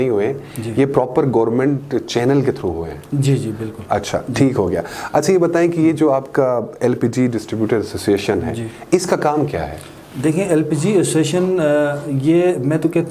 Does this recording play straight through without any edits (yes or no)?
yes